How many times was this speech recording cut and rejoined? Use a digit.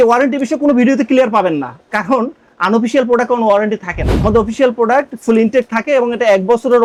0